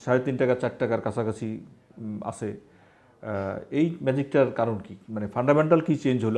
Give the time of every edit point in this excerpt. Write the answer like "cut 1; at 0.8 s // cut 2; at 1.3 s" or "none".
none